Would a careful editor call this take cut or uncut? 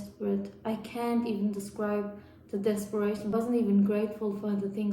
cut